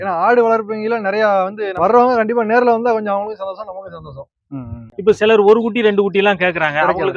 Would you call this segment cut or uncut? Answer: cut